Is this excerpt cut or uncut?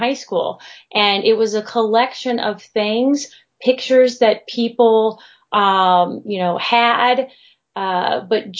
uncut